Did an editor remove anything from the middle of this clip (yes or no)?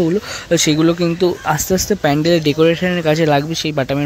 no